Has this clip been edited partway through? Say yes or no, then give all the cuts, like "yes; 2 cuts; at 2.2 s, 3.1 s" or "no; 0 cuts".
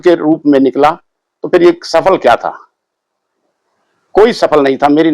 no; 0 cuts